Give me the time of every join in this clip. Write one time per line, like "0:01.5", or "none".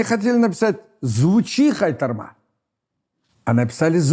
none